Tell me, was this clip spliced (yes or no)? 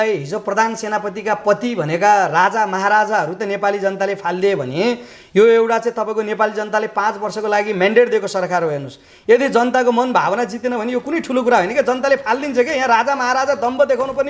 no